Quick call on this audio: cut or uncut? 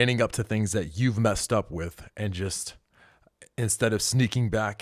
uncut